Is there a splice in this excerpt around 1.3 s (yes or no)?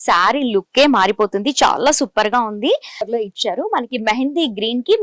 no